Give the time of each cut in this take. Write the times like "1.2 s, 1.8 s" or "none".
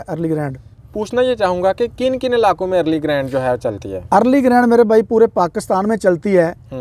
none